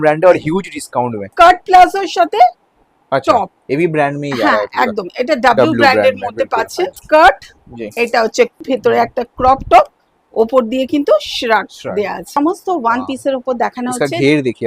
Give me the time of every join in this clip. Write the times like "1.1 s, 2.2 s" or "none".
1.2 s, 7.0 s, 8.6 s, 12.4 s